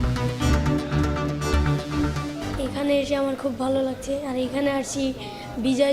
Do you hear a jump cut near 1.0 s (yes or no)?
no